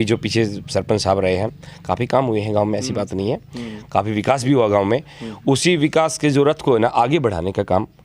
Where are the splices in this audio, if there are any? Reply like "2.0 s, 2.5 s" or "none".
none